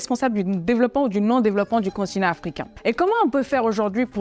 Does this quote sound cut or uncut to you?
uncut